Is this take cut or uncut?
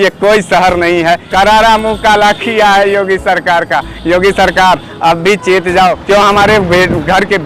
cut